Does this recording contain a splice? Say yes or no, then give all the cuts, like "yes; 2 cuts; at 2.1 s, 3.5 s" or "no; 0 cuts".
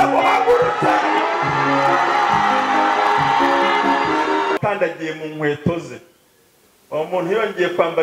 yes; 1 cut; at 4.6 s